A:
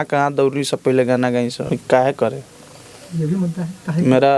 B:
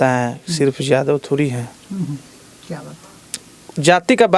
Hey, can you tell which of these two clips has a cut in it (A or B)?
A